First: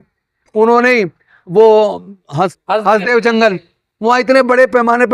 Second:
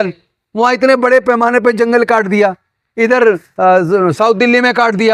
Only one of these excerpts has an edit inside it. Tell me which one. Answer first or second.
first